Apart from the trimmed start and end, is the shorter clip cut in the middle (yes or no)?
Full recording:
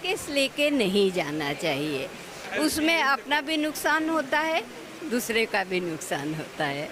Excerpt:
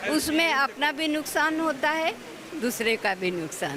no